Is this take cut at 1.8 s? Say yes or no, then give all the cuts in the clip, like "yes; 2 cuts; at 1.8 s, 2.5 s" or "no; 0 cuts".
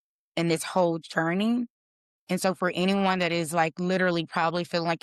no; 0 cuts